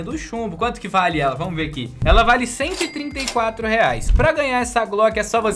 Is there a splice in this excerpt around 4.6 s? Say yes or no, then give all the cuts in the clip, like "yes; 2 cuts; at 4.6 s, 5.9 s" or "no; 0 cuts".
no; 1 cut; at 1.9 s